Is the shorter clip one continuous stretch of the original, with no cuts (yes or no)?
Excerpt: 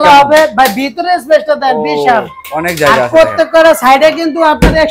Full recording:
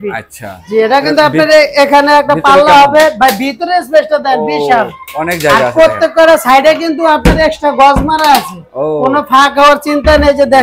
yes